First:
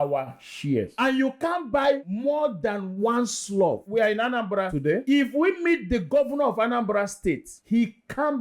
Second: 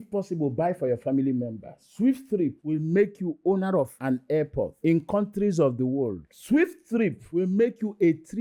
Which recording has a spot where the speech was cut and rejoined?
first; 3 cuts; at 3.8 s, 5.0 s, 7.5 s

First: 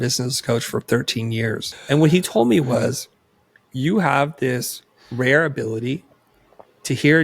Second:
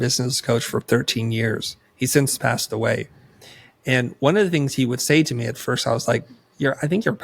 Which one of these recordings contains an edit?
first; 1 cut; at 1.8 s

